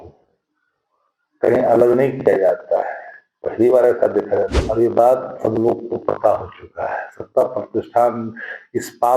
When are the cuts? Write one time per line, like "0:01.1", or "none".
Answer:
0:04.5